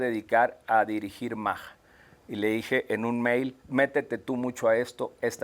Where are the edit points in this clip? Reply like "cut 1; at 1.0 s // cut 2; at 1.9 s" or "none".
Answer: cut 1; at 3.6 s